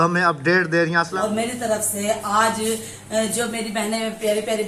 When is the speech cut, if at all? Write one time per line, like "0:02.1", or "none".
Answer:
0:01.1